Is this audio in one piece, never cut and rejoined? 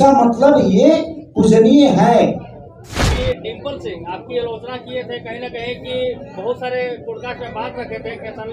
no; 1 cut; at 3.1 s

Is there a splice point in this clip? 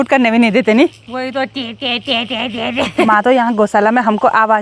yes; 1 cut; at 3.1 s

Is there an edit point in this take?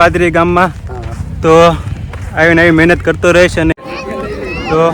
yes; 1 cut; at 3.7 s

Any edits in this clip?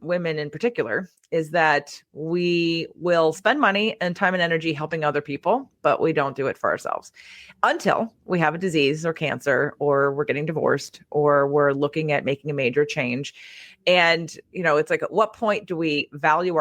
no; 0 cuts

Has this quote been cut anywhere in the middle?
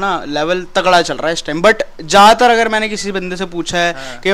no; 0 cuts

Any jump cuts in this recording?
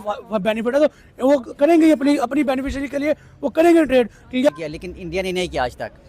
yes; 1 cut; at 4.5 s

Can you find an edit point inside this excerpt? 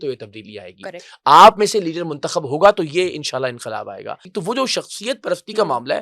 yes; 1 cut; at 4.1 s

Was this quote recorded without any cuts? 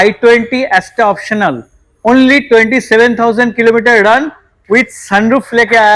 yes; 0 cuts

